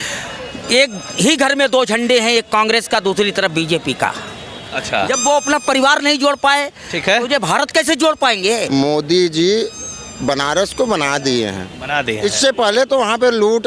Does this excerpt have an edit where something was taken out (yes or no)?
yes